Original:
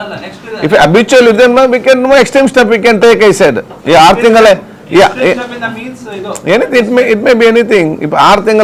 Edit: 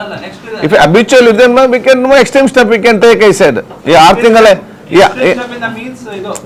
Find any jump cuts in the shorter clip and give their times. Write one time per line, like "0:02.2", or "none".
none